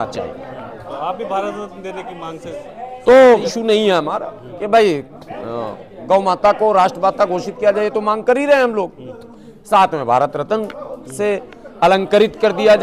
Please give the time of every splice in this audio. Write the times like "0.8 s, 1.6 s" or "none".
3.5 s